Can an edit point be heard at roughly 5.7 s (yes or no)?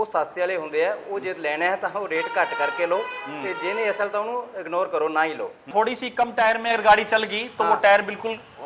yes